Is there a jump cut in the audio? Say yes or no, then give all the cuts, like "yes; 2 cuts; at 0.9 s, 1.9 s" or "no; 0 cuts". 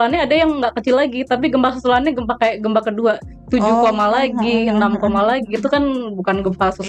no; 0 cuts